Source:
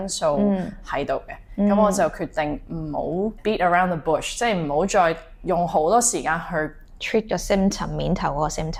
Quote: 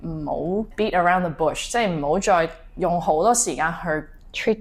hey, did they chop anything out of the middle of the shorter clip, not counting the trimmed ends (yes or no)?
no